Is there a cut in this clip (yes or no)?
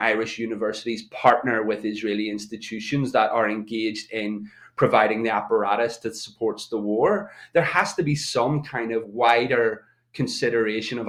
no